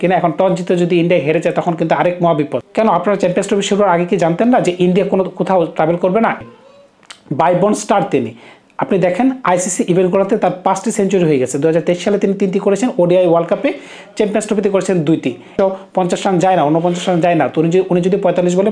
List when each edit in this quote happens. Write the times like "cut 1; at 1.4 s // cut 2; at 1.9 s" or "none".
cut 1; at 2.6 s // cut 2; at 6.4 s // cut 3; at 15.5 s